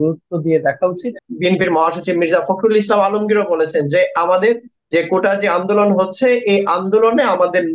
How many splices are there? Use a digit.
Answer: 1